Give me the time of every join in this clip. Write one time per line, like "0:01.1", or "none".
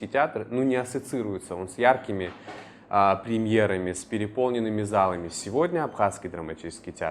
none